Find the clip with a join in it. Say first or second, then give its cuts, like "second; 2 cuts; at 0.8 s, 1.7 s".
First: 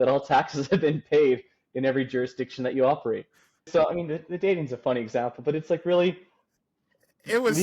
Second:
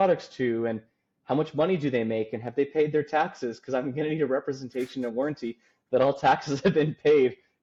first; 1 cut; at 3.7 s